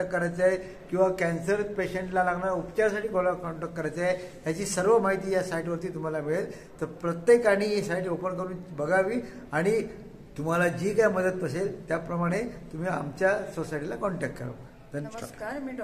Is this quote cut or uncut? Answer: uncut